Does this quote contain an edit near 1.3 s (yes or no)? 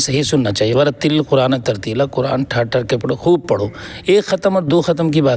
no